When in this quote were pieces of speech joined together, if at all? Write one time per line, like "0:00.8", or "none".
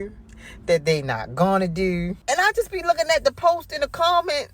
0:02.1